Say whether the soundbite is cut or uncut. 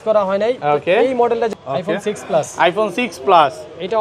cut